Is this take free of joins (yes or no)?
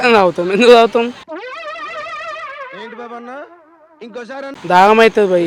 no